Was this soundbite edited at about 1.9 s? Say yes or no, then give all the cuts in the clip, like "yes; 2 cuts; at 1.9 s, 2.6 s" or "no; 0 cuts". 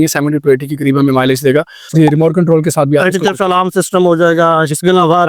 yes; 1 cut; at 1.9 s